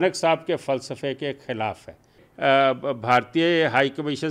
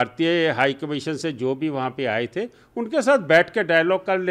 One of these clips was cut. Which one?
first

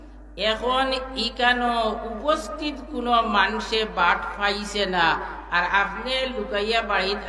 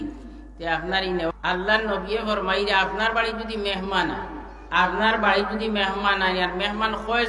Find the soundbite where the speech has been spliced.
second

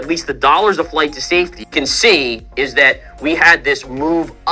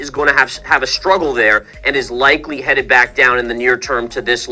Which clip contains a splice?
first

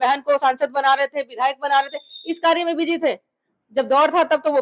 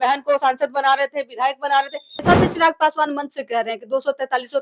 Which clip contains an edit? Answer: second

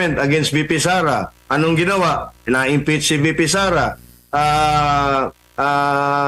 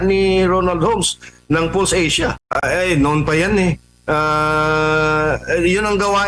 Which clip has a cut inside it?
second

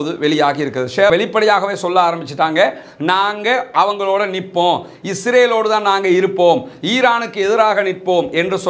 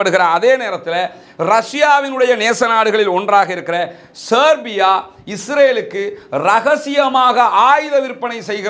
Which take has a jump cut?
first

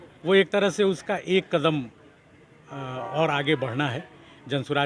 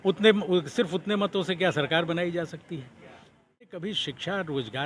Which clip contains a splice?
second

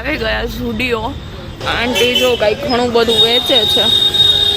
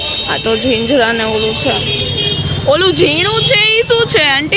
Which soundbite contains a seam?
first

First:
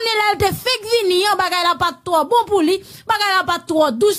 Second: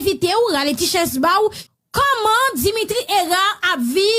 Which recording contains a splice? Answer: second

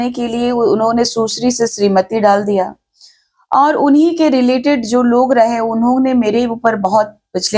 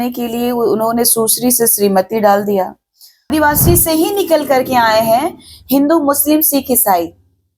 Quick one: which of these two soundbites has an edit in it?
second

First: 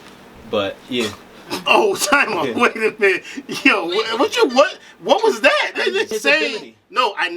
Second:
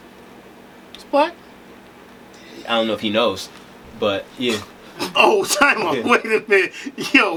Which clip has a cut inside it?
first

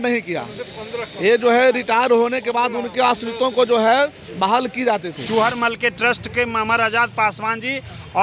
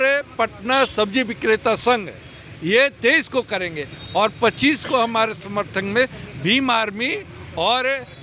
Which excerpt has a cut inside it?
first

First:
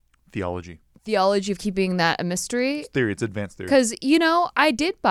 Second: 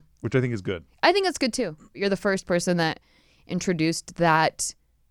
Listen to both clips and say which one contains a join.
second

